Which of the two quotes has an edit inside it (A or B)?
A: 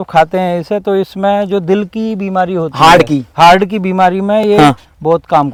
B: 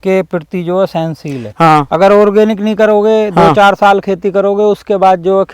B